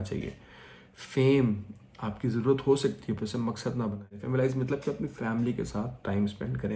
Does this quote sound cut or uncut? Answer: cut